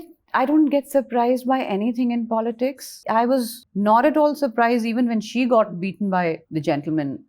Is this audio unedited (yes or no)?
no